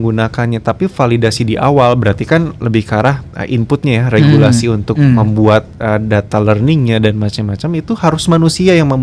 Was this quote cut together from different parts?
no; 0 cuts

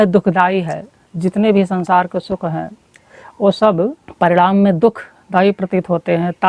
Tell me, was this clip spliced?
yes; 1 cut; at 4.0 s

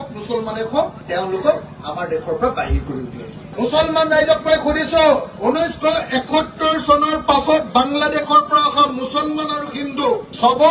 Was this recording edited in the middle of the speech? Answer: yes; 2 cuts; at 3.5 s, 5.3 s

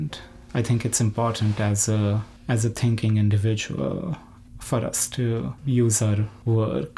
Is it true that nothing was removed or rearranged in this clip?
yes; 0 cuts

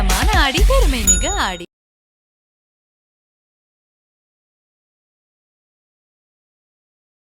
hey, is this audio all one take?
yes; 0 cuts

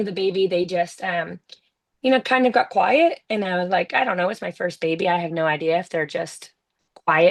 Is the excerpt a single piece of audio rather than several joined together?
yes; 0 cuts

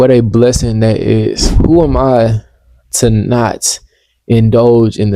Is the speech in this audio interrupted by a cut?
yes; 1 cut; at 1.5 s

